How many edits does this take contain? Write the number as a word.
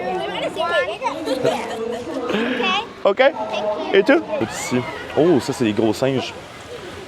one